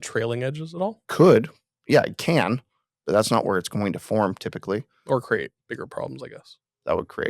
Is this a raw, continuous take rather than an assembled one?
no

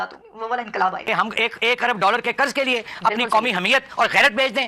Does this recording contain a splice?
yes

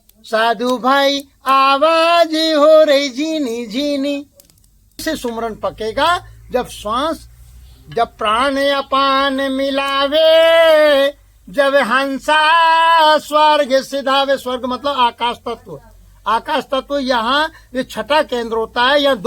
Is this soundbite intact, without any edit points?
no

